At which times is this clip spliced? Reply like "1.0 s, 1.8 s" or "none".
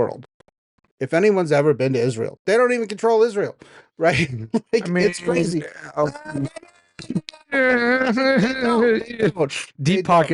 none